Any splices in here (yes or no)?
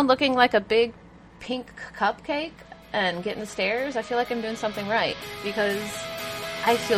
no